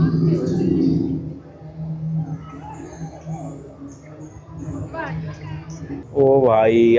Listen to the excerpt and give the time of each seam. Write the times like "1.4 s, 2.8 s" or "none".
6.1 s